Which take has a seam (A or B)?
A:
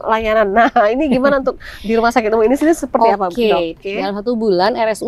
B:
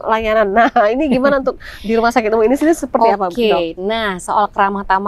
A